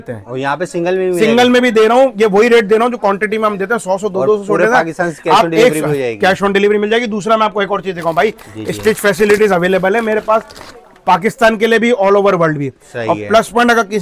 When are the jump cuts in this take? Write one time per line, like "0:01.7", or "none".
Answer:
none